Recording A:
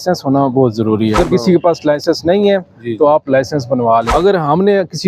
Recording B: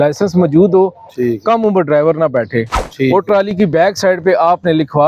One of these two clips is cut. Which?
A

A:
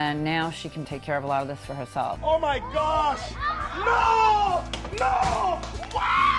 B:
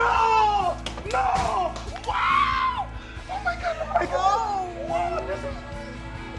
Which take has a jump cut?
A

